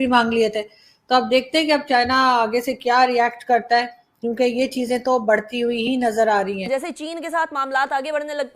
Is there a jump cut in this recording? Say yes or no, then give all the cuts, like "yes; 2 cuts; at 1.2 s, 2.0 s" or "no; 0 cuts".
yes; 1 cut; at 6.6 s